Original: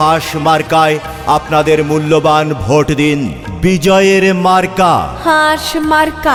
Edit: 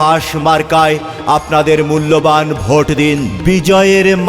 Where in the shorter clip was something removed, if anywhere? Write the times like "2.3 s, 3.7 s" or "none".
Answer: 3.3 s